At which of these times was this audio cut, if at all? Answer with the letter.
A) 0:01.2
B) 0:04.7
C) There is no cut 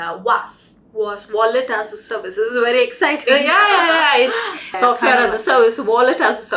B